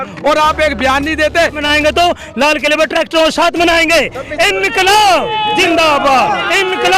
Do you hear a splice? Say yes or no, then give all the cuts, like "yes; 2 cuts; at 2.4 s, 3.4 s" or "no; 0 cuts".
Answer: yes; 1 cut; at 1.6 s